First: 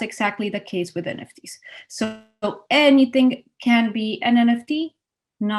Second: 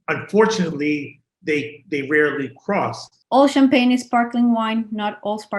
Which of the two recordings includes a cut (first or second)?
second